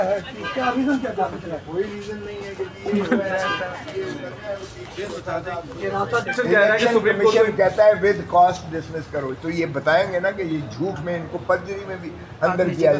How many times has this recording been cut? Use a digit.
1